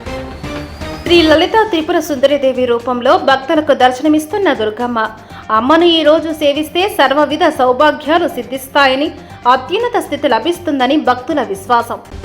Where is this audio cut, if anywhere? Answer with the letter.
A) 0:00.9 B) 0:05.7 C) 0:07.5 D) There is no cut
A